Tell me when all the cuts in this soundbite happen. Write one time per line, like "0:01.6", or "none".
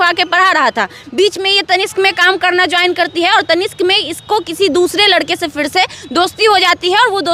none